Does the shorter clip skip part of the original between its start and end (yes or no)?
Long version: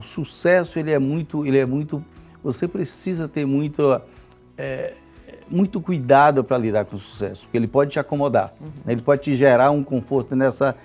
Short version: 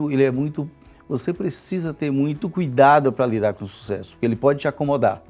yes